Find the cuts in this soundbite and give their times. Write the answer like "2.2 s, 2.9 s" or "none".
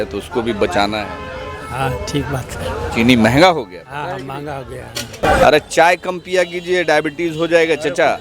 5.3 s